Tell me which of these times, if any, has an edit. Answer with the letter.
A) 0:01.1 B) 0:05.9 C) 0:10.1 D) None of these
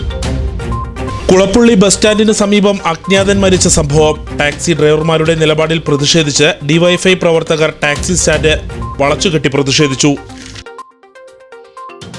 A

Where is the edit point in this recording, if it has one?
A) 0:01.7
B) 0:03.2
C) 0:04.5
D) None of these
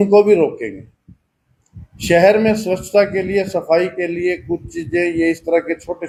D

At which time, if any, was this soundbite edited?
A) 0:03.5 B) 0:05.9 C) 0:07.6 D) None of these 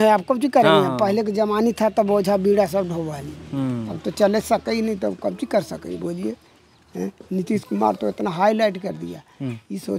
D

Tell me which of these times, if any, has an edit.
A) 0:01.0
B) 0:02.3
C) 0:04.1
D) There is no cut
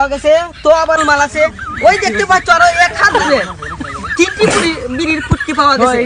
A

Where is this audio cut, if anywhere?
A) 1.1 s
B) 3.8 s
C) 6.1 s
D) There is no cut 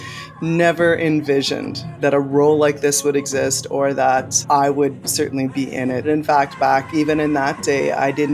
C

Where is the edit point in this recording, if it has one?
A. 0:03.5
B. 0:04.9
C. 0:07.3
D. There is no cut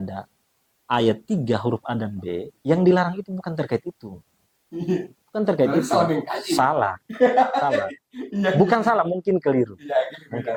D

